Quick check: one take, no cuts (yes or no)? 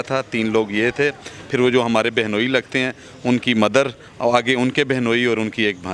yes